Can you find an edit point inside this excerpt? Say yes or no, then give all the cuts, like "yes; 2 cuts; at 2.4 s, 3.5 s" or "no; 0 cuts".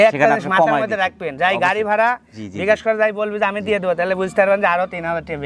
no; 0 cuts